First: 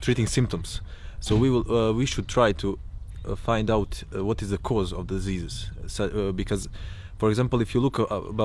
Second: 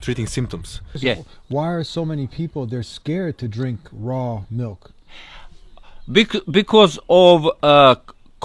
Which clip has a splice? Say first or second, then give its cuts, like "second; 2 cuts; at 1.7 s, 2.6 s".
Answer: second; 1 cut; at 0.9 s